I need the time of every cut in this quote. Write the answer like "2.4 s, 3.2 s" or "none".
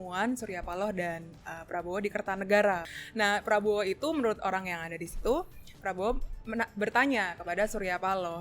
3.0 s